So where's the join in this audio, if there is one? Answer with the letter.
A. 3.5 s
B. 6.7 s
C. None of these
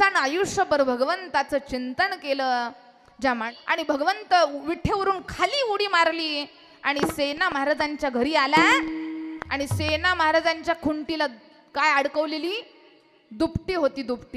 A